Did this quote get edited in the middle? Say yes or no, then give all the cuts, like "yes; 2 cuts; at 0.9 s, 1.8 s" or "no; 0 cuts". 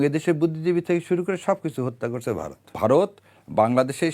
yes; 1 cut; at 2.4 s